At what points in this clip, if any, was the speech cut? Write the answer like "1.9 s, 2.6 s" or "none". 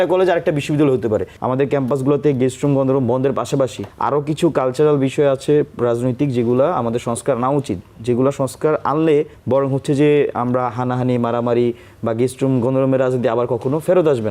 1.3 s, 3.9 s, 9.4 s